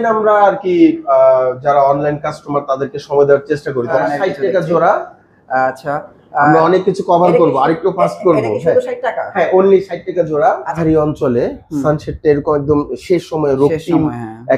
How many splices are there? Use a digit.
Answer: 2